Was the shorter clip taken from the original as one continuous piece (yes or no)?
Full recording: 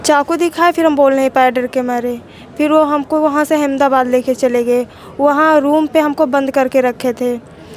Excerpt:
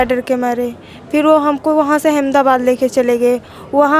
yes